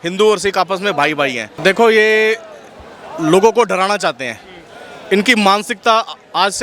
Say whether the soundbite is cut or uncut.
cut